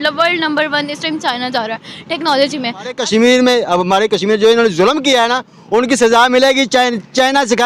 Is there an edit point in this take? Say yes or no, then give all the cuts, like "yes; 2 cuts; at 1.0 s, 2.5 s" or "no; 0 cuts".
yes; 1 cut; at 3.0 s